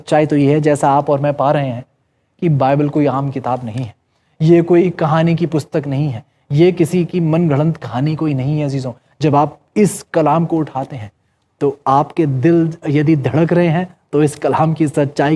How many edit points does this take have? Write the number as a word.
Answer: zero